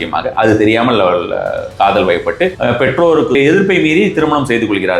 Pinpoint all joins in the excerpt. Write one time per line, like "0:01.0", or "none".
0:02.6
0:03.4